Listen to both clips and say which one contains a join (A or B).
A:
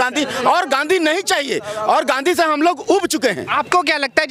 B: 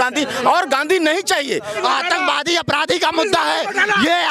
B